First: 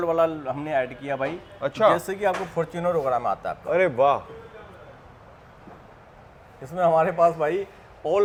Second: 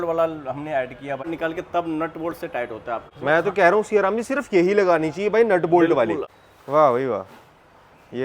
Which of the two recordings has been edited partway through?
second; 3 cuts; at 1.3 s, 3.1 s, 6.3 s

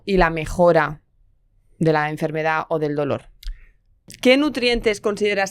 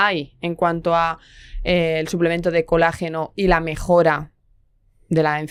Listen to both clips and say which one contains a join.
first; 1 cut; at 4.0 s

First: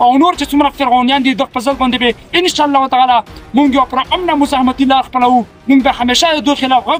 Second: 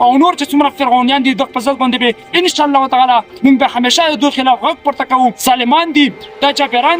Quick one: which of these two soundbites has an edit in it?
second; 2 cuts; at 3.3 s, 5.4 s

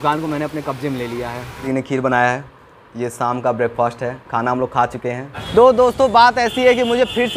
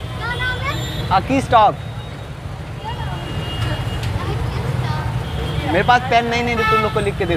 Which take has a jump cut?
first; 2 cuts; at 1.6 s, 5.4 s

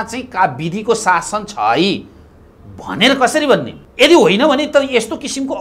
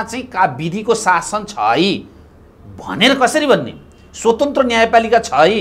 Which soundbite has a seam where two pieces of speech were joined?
first; 1 cut; at 3.8 s

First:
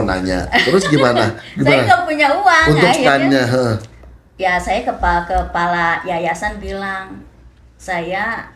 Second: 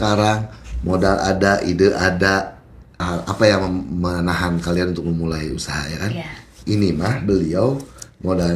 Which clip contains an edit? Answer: second; 1 cut; at 3.0 s

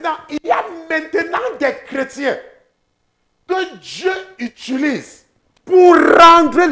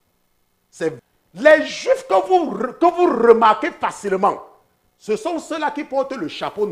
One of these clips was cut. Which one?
second; 1 cut; at 1.0 s

